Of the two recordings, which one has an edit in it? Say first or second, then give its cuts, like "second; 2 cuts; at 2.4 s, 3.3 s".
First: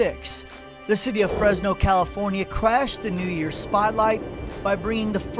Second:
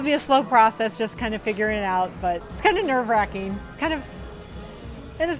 second; 1 cut; at 2.5 s